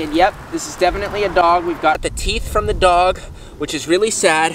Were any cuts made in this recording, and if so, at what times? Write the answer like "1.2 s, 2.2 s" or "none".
none